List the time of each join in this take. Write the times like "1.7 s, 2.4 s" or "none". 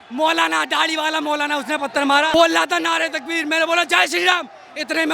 2.3 s

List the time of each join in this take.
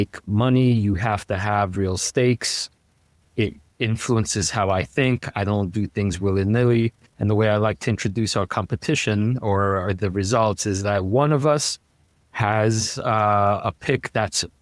none

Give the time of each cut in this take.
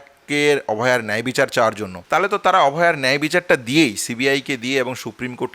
1.9 s

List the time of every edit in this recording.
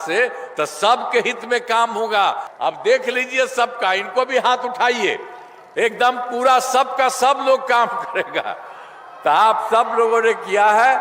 2.5 s

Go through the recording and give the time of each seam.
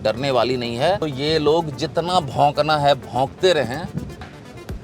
1.0 s

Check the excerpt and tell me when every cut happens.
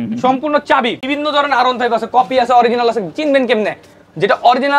1.0 s

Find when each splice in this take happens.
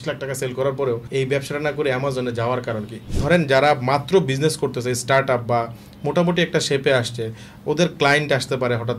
1.0 s, 3.0 s

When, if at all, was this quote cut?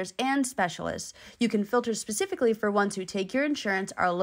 none

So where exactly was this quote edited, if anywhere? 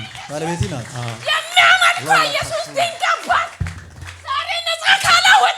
1.2 s

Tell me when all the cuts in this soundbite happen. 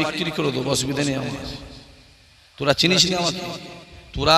none

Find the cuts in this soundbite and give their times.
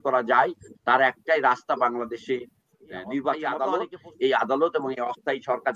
3.6 s

